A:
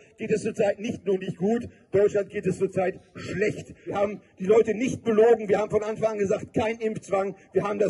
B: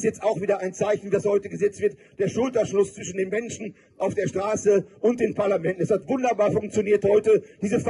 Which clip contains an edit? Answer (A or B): A